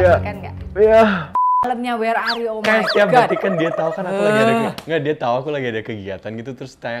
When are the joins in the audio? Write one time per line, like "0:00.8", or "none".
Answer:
0:01.6